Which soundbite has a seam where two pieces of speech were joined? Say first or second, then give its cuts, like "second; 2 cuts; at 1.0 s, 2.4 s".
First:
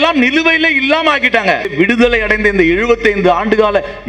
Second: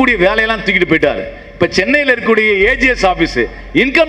first; 1 cut; at 1.7 s